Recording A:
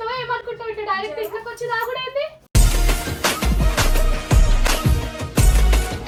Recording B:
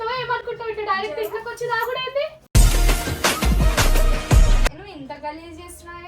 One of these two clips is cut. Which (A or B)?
B